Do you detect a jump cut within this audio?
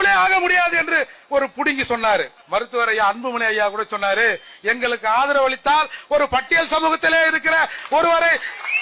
yes; 1 cut; at 2.4 s

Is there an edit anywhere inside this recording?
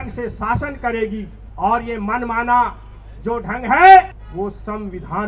yes; 2 cuts; at 1.4 s, 4.2 s

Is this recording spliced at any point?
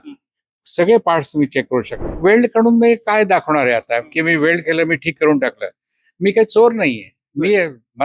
yes; 1 cut; at 2.0 s

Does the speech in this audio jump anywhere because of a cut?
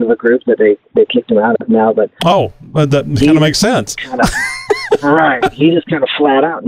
no; 0 cuts

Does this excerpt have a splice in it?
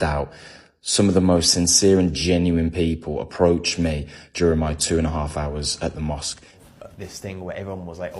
yes; 1 cut; at 6.6 s

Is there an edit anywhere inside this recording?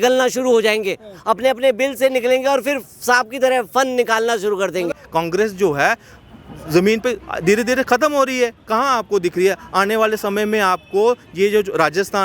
yes; 1 cut; at 5.0 s

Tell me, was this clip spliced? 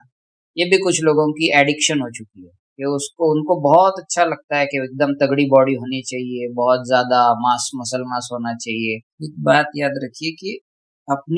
yes; 1 cut; at 9.2 s

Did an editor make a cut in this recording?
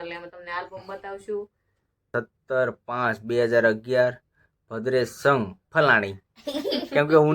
yes; 1 cut; at 2.1 s

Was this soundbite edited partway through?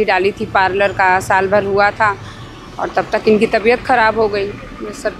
no; 0 cuts

